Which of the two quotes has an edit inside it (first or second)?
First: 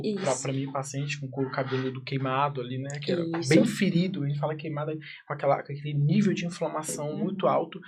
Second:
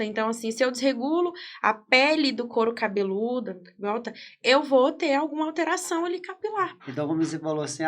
second